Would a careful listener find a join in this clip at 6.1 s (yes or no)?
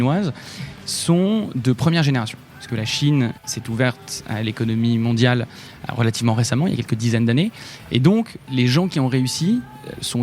no